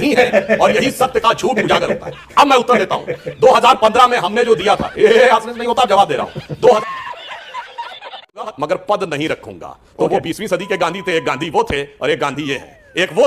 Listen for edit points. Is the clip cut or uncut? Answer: cut